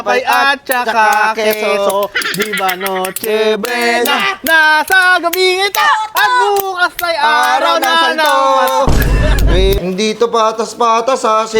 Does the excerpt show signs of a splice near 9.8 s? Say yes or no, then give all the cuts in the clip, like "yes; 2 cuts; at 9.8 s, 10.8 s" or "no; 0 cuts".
yes; 1 cut; at 9.8 s